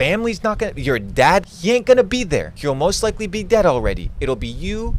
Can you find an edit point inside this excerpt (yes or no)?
yes